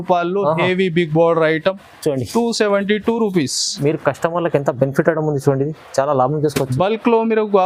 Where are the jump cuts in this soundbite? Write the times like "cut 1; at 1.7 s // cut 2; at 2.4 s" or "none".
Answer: none